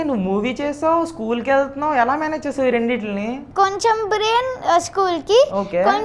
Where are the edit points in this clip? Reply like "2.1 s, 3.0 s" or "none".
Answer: 3.4 s